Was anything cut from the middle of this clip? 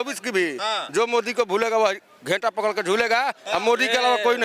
no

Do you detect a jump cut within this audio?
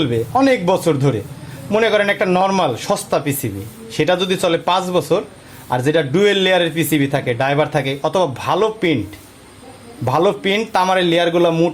no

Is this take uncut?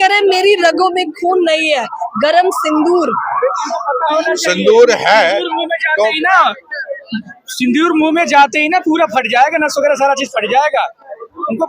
yes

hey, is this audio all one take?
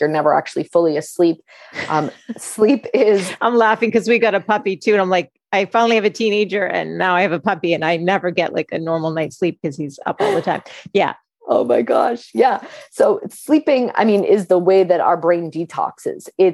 yes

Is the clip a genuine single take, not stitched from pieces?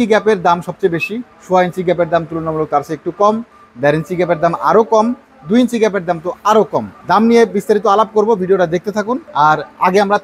yes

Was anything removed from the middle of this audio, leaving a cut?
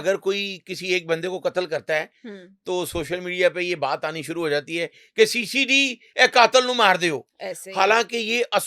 no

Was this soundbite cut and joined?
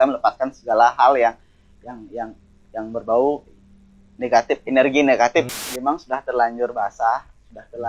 yes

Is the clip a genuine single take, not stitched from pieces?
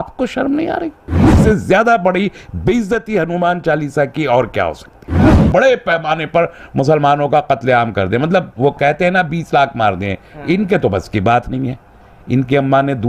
no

